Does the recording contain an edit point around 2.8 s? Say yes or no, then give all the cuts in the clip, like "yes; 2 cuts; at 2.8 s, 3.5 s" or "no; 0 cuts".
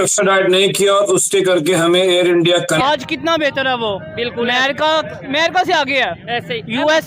yes; 1 cut; at 2.8 s